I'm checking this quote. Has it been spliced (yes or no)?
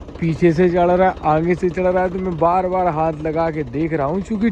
no